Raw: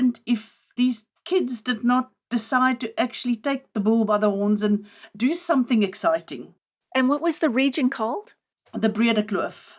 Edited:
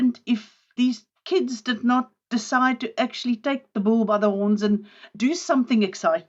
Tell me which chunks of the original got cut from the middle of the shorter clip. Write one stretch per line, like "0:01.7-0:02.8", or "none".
none